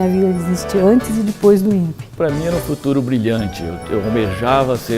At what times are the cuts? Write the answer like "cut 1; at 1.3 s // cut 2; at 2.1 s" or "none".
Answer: cut 1; at 2.1 s